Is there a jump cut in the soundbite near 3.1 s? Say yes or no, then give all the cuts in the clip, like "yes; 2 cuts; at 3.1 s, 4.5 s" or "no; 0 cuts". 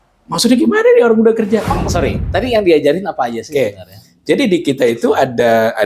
no; 1 cut; at 1.9 s